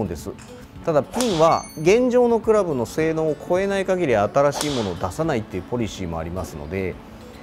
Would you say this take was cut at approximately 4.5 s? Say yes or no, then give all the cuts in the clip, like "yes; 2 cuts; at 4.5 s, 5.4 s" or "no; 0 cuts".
no; 1 cut; at 1.7 s